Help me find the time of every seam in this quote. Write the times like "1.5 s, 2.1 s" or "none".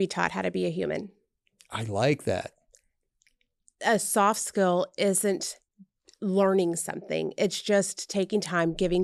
none